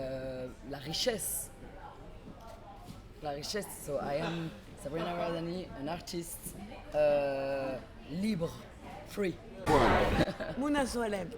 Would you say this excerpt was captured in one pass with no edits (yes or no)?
no